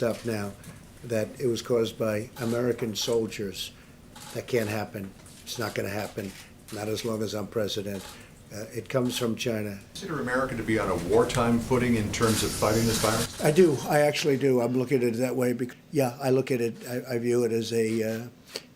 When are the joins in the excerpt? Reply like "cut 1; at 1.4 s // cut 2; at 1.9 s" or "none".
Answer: cut 1; at 9.9 s // cut 2; at 15.7 s